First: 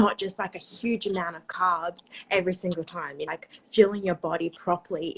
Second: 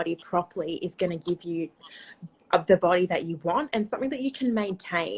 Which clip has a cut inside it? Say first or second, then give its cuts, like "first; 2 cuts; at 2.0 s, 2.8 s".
first; 1 cut; at 3.2 s